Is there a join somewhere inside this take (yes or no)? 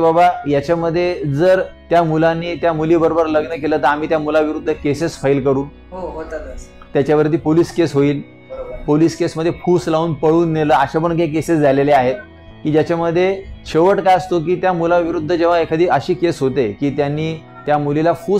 no